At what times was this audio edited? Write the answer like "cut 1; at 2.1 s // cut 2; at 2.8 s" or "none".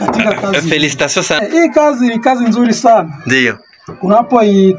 cut 1; at 1.4 s